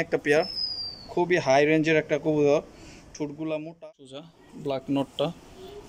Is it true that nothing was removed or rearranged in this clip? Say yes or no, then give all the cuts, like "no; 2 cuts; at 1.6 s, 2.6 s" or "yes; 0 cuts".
no; 1 cut; at 4.4 s